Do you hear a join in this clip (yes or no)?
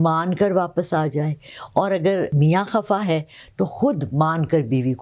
yes